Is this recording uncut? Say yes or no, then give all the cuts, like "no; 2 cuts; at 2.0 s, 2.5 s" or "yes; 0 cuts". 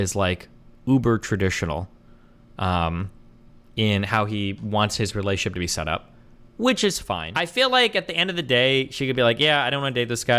no; 1 cut; at 7.3 s